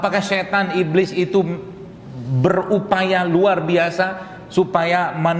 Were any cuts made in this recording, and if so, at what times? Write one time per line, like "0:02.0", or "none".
none